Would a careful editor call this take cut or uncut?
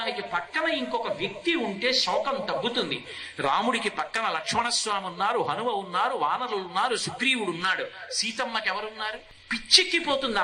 cut